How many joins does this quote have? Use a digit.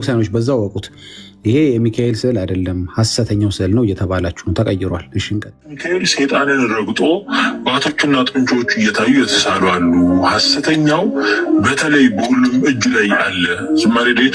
1